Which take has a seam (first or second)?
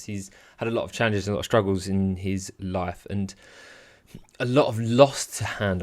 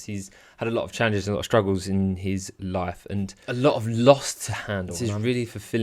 second